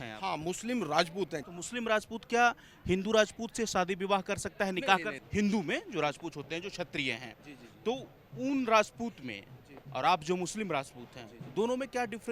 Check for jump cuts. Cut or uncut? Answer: cut